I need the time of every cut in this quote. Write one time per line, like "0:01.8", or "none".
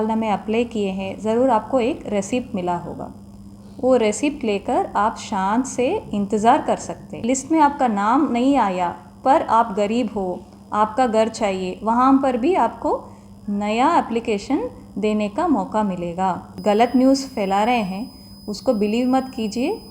0:07.2
0:16.5

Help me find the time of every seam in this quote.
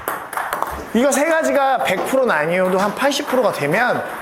none

